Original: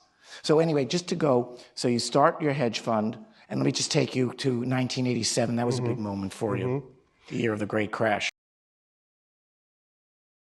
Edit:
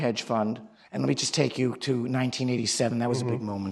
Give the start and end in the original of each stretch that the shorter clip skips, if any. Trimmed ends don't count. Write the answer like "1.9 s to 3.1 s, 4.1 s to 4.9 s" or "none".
none